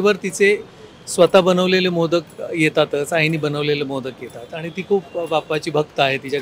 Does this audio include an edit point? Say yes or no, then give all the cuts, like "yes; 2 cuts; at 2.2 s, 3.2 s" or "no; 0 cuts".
no; 0 cuts